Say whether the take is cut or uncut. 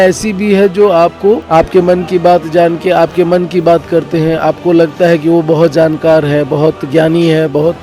cut